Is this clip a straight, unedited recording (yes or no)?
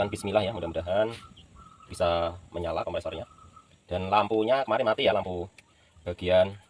yes